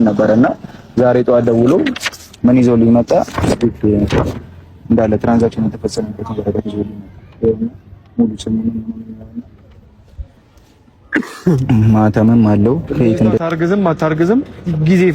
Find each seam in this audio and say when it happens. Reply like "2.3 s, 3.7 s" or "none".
13.4 s